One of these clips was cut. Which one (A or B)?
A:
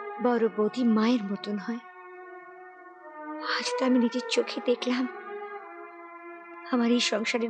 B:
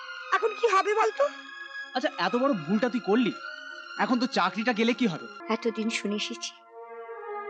B